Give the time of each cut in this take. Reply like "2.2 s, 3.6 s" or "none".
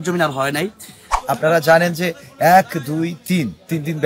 1.1 s